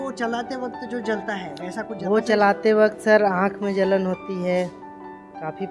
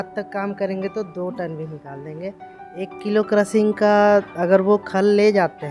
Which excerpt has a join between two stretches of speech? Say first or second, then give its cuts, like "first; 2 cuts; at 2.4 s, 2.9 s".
second; 1 cut; at 2.6 s